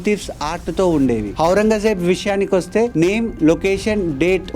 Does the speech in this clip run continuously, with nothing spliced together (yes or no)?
no